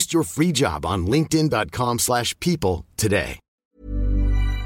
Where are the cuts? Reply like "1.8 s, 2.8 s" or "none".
3.5 s

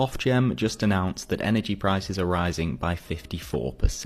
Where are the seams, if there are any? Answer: none

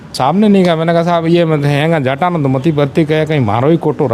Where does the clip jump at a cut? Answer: none

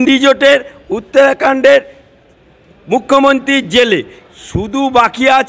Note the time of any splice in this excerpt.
none

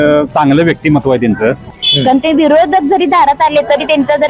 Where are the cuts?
1.7 s

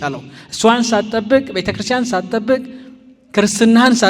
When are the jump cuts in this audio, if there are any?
none

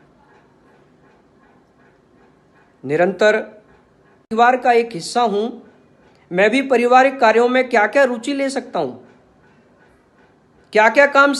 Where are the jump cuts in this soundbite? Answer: 4.3 s

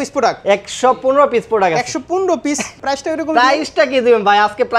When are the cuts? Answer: 2.7 s

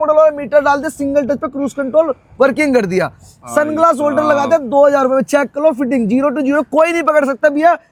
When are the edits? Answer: none

